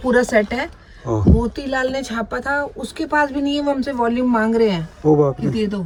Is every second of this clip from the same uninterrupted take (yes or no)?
yes